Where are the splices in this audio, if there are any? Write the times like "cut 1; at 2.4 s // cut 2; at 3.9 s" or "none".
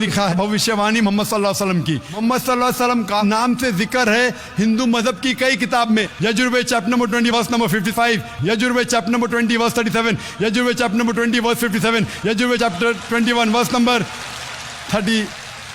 cut 1; at 2.1 s // cut 2; at 6.1 s